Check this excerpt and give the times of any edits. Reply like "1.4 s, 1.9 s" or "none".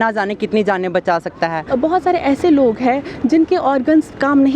1.6 s